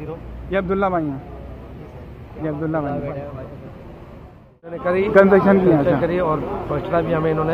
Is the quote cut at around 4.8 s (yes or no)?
yes